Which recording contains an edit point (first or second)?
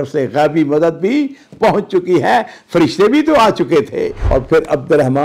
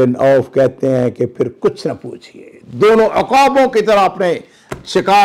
first